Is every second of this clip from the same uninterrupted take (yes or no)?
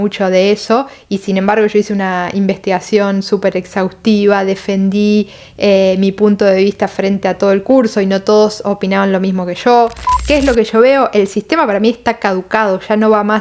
no